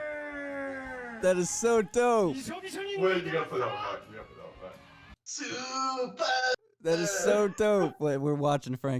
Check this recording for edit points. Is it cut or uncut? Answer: uncut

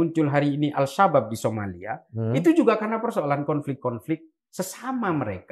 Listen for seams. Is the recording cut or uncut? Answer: uncut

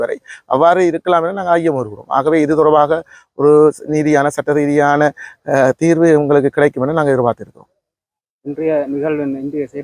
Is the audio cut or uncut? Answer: uncut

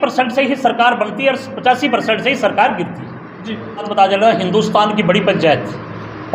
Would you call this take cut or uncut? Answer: cut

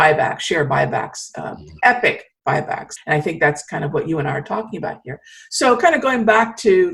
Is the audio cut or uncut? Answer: cut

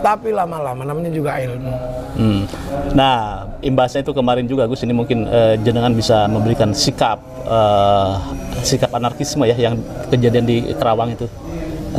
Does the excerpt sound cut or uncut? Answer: uncut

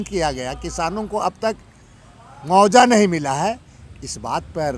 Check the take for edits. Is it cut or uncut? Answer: uncut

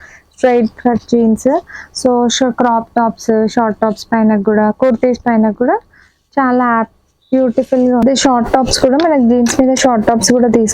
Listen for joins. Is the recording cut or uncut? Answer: cut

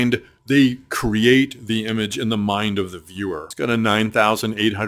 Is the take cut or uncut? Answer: cut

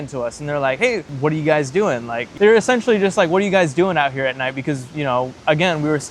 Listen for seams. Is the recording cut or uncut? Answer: cut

